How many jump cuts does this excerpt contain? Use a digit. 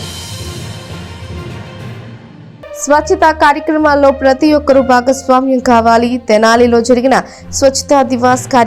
1